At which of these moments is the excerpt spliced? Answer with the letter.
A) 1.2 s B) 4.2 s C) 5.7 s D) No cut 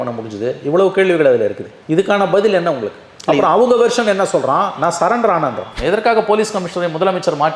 C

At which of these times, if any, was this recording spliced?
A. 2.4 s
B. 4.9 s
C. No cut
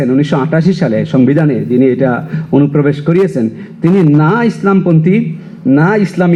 C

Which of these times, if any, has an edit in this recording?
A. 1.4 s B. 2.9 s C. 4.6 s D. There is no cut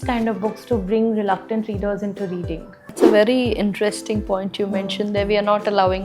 B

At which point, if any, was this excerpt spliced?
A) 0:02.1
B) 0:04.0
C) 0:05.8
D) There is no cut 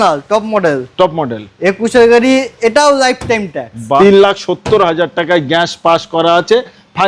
B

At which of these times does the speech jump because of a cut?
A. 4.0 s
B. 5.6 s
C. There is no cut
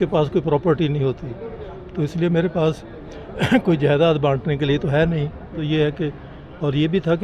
B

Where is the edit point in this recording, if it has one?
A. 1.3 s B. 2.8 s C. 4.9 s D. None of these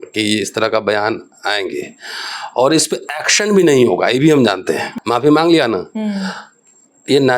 C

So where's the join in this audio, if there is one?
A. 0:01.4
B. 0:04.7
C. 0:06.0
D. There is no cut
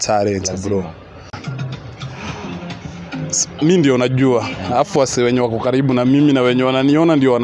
A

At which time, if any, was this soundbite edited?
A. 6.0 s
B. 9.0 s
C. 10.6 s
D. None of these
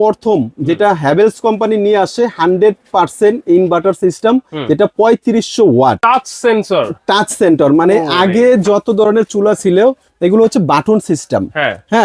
A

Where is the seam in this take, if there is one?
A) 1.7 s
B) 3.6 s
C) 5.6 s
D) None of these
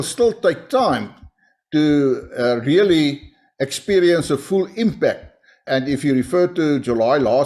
C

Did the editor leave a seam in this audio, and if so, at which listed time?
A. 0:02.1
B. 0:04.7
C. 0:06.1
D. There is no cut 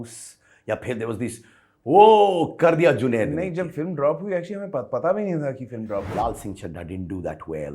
C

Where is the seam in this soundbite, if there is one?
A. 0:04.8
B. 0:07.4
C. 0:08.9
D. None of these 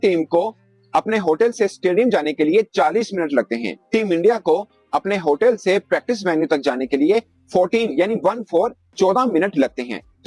D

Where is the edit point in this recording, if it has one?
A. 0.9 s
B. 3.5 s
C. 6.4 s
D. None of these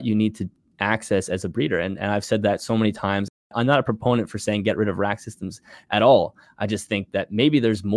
B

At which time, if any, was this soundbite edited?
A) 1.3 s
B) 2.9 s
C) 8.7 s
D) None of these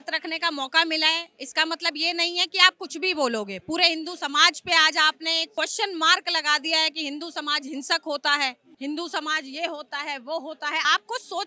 D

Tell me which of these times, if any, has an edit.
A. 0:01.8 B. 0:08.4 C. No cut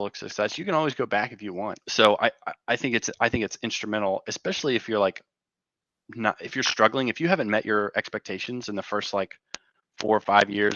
A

